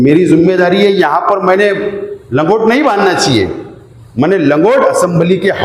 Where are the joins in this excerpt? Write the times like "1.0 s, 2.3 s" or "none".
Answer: none